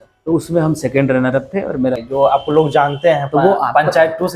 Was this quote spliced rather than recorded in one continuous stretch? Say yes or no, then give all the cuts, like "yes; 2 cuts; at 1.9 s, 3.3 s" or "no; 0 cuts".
yes; 1 cut; at 2.0 s